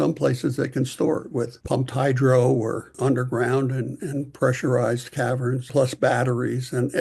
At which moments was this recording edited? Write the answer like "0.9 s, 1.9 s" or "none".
1.6 s, 2.9 s, 5.7 s